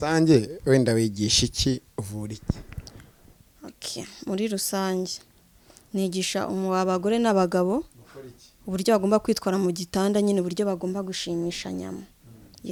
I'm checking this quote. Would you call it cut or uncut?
uncut